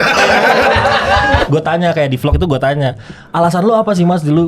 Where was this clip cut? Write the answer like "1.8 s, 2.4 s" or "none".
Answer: 1.4 s